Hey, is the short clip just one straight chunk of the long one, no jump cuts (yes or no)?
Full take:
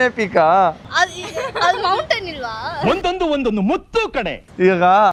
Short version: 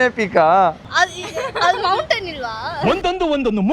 yes